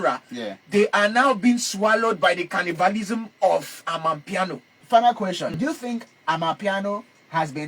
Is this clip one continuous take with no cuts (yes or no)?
no